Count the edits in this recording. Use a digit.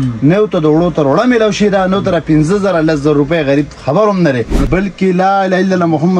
1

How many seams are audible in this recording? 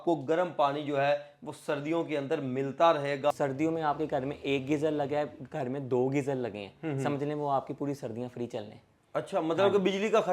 1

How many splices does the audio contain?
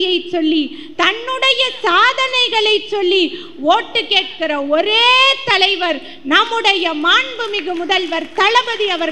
0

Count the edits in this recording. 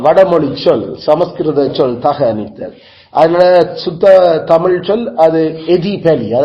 0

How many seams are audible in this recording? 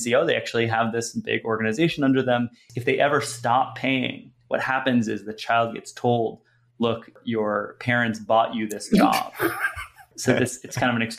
3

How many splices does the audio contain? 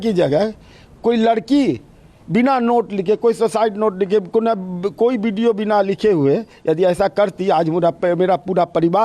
0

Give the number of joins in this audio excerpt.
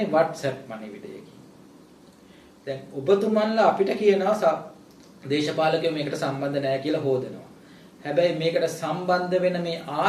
0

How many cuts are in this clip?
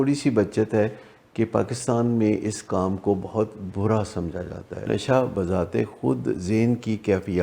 1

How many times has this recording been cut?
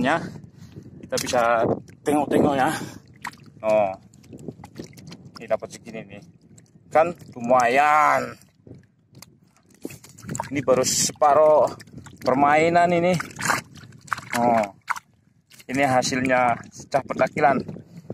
0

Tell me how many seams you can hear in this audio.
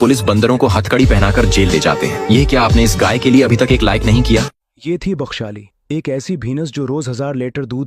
1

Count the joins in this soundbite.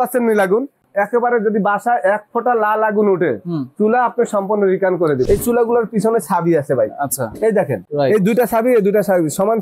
3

